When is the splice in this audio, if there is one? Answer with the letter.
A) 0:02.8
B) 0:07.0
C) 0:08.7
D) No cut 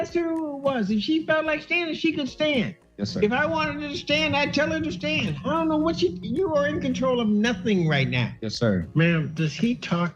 C